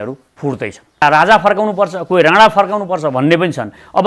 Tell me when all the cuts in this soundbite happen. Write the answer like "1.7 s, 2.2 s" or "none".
1.0 s